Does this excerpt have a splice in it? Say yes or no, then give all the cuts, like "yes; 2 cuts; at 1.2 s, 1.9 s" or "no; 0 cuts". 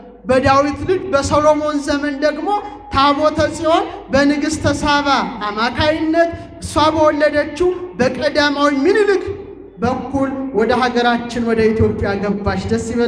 no; 0 cuts